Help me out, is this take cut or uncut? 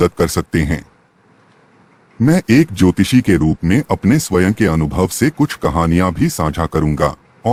uncut